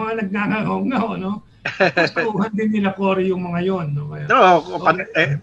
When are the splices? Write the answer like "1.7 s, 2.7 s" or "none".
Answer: none